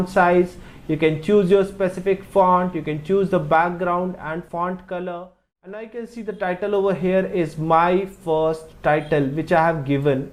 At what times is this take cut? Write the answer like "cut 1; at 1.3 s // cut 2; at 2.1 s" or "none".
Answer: cut 1; at 5.8 s